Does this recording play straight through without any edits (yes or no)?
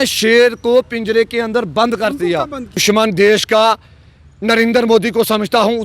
no